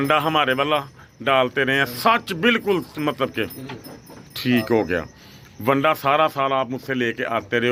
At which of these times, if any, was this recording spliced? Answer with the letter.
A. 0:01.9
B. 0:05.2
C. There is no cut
C